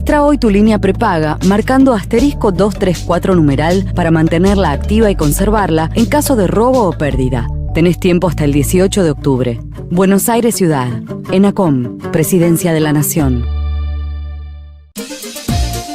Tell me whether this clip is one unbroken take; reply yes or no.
no